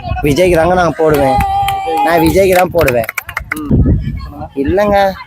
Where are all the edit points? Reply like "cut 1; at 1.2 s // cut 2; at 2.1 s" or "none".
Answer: cut 1; at 3.7 s

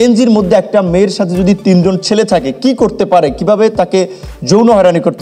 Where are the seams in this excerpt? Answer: none

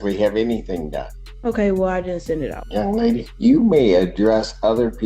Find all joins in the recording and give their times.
cut 1; at 3.0 s

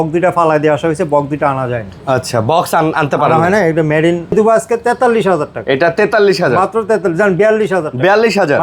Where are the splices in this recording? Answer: cut 1; at 4.3 s

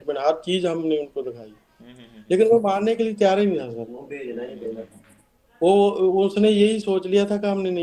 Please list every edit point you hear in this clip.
none

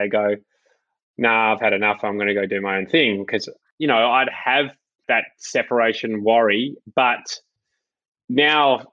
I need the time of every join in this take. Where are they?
cut 1; at 3.6 s // cut 2; at 5.0 s

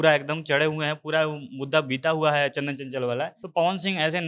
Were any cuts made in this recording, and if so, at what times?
cut 1; at 3.4 s

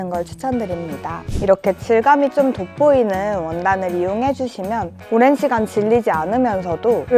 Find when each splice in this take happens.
cut 1; at 1.3 s // cut 2; at 5.0 s

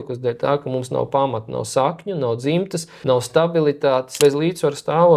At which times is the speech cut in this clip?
cut 1; at 2.9 s // cut 2; at 4.1 s

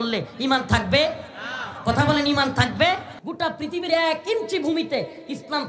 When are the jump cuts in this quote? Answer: cut 1; at 3.2 s

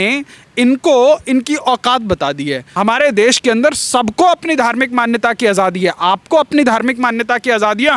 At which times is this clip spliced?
cut 1; at 2.6 s

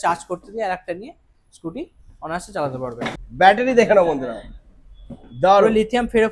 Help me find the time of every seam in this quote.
cut 1; at 3.1 s

